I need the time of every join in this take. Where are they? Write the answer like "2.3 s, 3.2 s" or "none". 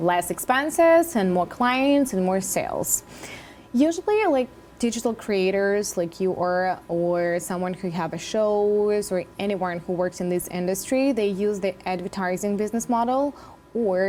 none